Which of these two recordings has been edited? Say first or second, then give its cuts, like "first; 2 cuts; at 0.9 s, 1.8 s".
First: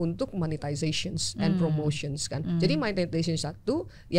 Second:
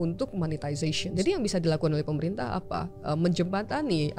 second; 1 cut; at 1.1 s